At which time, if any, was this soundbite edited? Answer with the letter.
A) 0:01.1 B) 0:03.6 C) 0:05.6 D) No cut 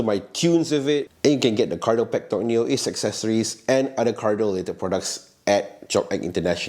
A